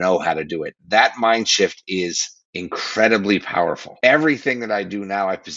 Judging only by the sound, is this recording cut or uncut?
cut